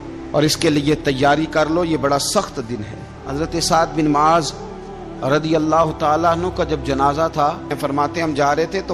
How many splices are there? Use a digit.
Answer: 2